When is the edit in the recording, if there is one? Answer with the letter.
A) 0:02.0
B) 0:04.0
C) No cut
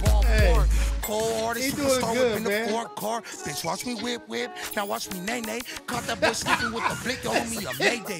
C